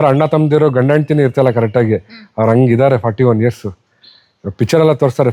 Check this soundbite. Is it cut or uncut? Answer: uncut